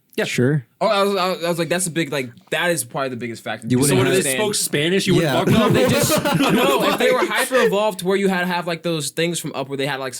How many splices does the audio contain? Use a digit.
0